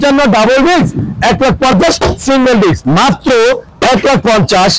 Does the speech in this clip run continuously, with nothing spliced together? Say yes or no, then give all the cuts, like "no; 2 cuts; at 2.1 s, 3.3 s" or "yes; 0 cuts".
no; 1 cut; at 2.8 s